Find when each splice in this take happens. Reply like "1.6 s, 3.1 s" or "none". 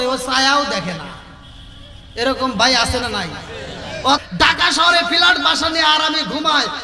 4.2 s

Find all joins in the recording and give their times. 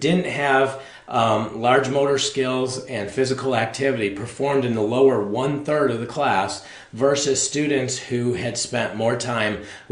none

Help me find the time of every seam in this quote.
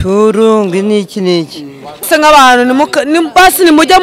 2.1 s

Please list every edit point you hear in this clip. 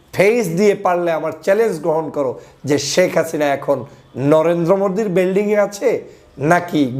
none

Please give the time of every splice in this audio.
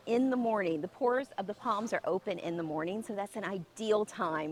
none

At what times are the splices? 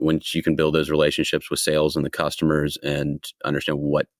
none

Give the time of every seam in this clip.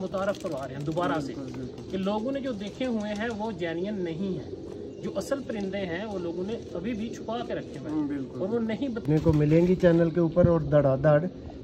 9.0 s

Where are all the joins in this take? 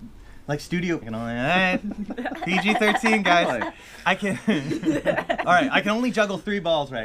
1.1 s

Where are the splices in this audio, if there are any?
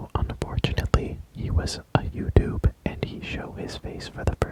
none

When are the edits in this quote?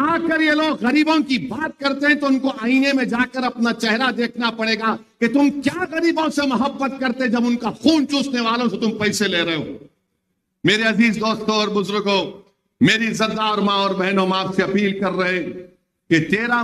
none

